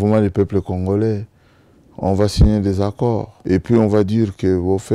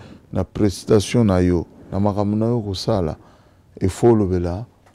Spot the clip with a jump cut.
first; 1 cut; at 3.3 s

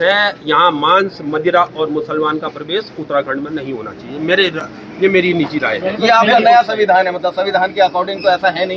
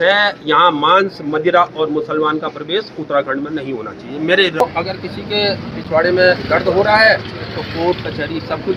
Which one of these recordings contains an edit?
second; 1 cut; at 4.6 s

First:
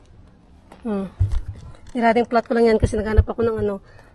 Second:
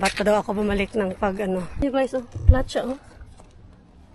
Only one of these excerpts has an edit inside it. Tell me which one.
second; 1 cut; at 1.8 s

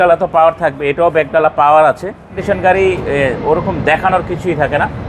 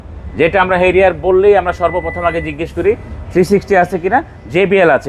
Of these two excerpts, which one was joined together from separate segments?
first; 1 cut; at 2.4 s

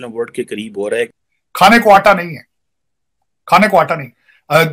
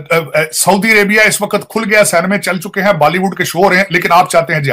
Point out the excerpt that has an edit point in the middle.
first; 1 cut; at 1.1 s

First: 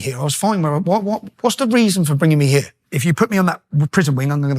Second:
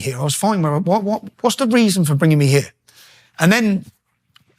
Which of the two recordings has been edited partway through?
first; 1 cut; at 2.8 s

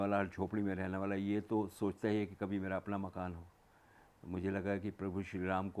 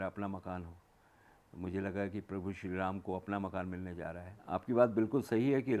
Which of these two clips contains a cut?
second; 1 cut; at 4.3 s

